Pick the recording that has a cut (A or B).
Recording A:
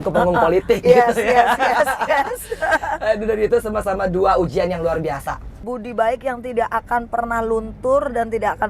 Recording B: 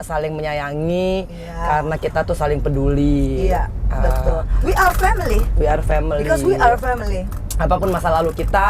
A